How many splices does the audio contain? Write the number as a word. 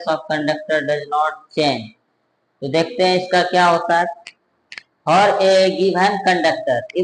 zero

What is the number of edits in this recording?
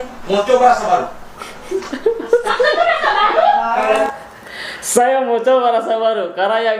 zero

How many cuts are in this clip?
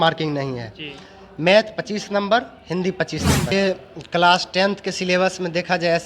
one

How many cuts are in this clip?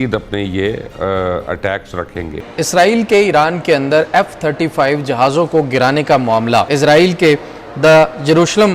two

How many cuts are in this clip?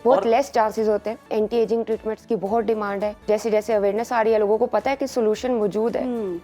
two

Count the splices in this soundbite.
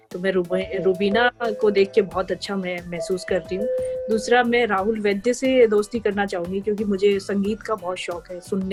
zero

